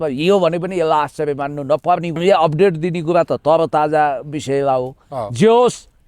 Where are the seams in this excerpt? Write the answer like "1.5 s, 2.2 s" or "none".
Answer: 2.2 s

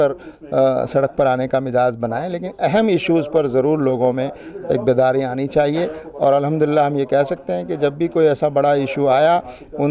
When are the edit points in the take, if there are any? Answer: none

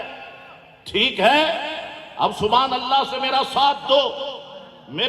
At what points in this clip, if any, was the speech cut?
none

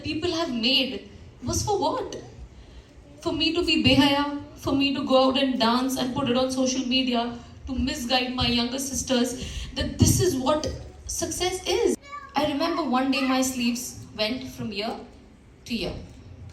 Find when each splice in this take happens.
12.1 s

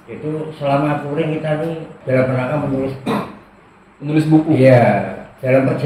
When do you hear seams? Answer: 1.9 s

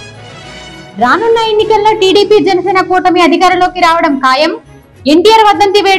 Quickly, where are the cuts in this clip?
none

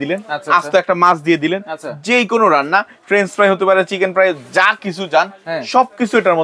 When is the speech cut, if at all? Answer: none

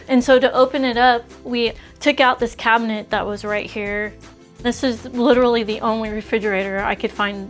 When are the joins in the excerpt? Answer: 4.3 s

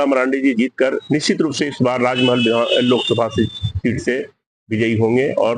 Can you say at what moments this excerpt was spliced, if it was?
none

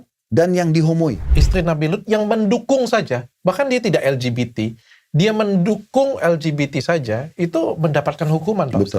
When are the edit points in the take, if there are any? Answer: 1.3 s

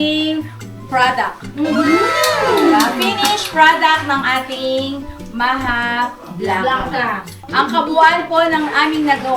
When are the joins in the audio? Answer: 7.4 s

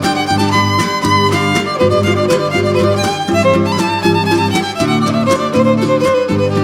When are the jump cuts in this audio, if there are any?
4.4 s

